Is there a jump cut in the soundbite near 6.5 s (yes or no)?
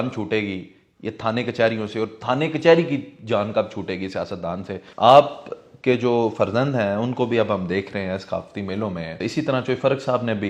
no